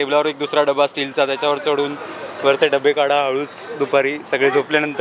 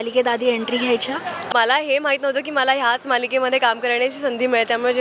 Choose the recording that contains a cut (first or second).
second